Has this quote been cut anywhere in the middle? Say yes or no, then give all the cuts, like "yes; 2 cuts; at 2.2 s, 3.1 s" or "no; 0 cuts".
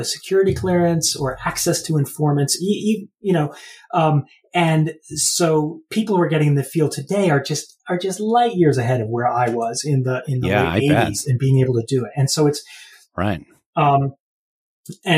no; 0 cuts